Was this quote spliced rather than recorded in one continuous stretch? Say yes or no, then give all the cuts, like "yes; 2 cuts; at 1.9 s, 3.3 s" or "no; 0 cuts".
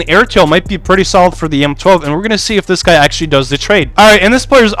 yes; 1 cut; at 3.9 s